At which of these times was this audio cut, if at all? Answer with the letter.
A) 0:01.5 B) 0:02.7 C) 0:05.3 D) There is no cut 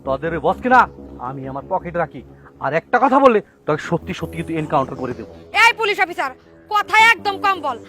C